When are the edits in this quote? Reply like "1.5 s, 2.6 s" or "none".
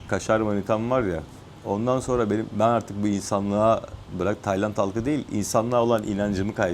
none